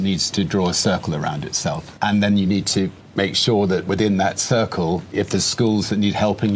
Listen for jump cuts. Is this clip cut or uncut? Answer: cut